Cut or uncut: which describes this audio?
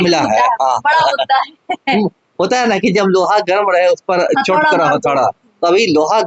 uncut